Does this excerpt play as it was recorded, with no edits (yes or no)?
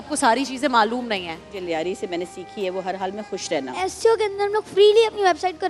no